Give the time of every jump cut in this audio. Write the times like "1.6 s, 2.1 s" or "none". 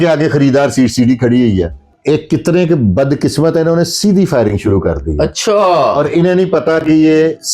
1.8 s